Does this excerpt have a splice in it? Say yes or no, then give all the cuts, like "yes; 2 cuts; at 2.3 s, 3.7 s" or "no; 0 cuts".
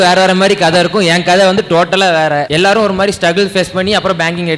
yes; 1 cut; at 2.5 s